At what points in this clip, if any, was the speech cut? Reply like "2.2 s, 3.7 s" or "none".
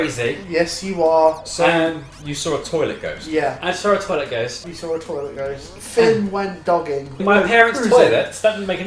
4.6 s, 5.8 s, 7.2 s

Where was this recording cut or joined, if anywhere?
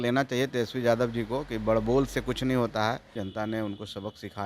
3.2 s

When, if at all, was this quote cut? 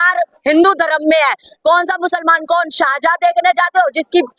none

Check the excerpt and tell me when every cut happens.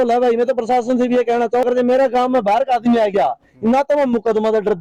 1.6 s

